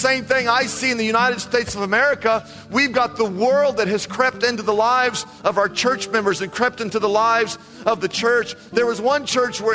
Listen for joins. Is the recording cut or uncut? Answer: uncut